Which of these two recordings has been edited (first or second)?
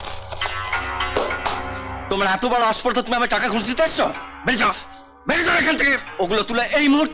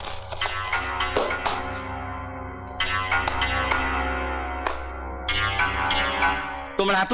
first